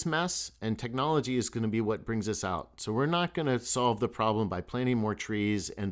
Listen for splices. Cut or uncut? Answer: uncut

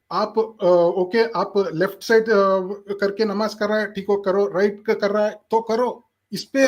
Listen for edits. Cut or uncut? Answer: uncut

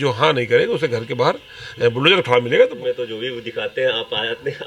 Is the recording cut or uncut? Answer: cut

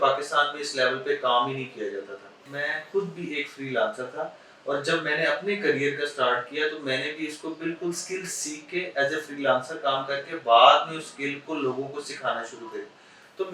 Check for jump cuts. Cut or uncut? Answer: cut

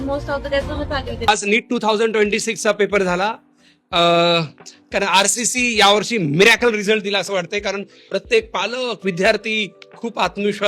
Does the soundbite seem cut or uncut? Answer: cut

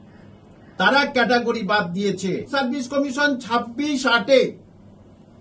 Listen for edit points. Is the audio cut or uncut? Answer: cut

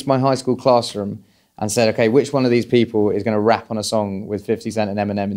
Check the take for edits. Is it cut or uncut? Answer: uncut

